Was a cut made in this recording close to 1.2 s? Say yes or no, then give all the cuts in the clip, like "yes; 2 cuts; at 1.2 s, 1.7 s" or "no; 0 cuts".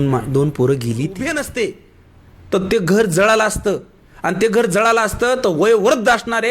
yes; 1 cut; at 1.2 s